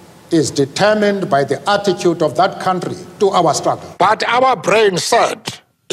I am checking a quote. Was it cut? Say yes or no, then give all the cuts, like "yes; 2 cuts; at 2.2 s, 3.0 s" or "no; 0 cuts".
yes; 1 cut; at 3.9 s